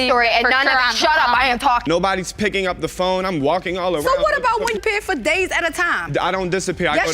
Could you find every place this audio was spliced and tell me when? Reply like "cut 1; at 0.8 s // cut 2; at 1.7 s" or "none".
cut 1; at 1.9 s

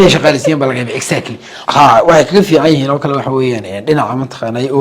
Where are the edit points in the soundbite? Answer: none

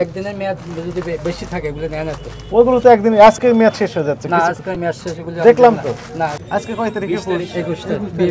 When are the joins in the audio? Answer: cut 1; at 6.4 s

